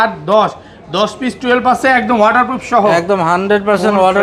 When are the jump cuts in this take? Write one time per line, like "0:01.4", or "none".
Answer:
none